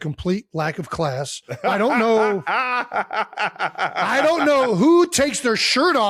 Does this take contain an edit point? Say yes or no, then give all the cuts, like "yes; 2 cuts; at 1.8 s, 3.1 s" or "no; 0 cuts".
no; 0 cuts